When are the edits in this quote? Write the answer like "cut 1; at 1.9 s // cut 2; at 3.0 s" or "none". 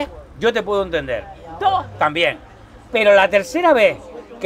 none